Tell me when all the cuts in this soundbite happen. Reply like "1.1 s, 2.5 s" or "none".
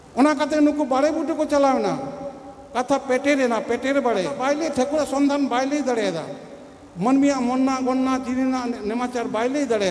4.4 s